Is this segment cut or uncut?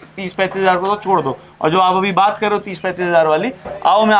uncut